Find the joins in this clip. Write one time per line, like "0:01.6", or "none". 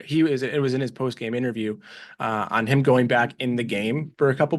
none